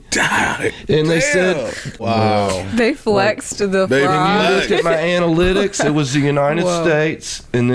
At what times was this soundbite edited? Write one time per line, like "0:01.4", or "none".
0:02.1